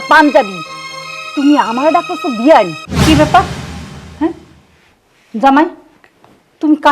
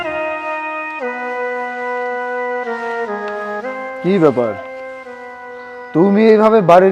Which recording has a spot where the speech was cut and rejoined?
first; 1 cut; at 2.9 s

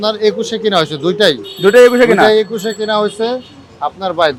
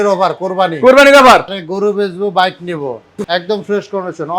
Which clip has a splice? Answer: second; 2 cuts; at 1.6 s, 3.1 s

